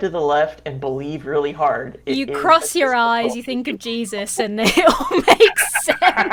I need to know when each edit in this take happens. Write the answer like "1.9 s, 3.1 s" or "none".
none